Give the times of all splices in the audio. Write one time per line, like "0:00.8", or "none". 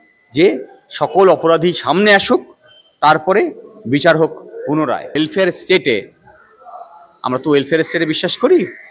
0:05.2